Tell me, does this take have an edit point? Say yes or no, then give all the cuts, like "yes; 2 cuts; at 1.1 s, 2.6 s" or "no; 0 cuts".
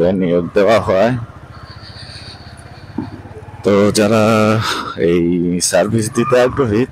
no; 0 cuts